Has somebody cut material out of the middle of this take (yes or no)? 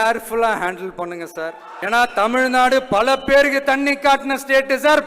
yes